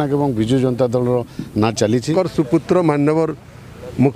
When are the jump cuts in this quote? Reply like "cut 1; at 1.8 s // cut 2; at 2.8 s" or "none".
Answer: cut 1; at 2.1 s